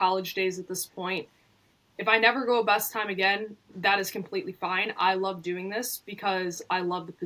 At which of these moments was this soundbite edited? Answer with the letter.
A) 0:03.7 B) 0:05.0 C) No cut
C